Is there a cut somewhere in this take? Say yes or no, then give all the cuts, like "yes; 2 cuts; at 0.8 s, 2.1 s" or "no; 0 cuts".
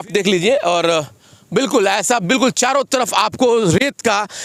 no; 0 cuts